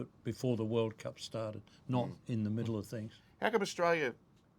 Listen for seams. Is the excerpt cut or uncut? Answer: cut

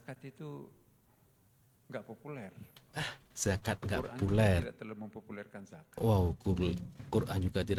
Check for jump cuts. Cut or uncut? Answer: uncut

